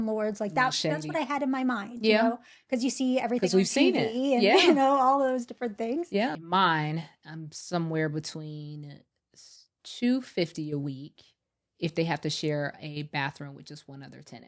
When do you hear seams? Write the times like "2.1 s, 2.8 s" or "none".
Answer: 6.4 s